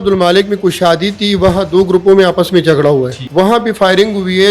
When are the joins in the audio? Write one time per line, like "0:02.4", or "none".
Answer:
0:03.2